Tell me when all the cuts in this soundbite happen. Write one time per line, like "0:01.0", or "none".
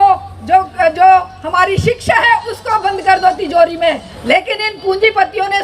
0:04.1